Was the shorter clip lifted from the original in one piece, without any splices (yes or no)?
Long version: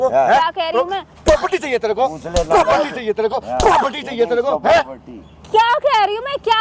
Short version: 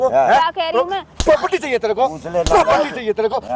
yes